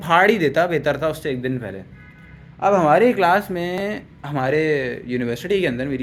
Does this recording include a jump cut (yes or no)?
no